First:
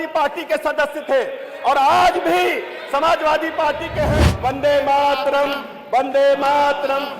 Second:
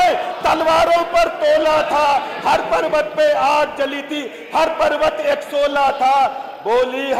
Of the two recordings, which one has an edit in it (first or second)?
first